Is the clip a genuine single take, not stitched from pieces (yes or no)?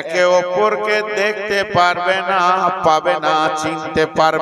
yes